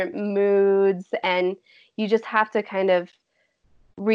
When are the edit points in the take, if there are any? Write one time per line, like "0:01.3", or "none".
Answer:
none